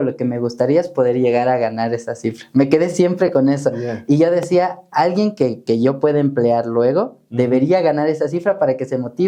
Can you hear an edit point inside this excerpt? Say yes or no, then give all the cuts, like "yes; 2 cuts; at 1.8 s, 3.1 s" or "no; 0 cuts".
no; 0 cuts